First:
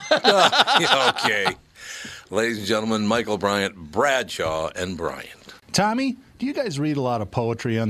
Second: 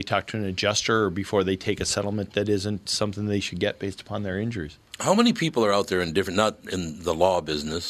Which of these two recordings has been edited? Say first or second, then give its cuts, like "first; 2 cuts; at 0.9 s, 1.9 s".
first; 1 cut; at 5.5 s